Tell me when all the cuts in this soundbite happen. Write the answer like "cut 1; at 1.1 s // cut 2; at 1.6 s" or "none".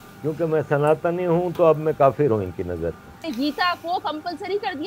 cut 1; at 3.1 s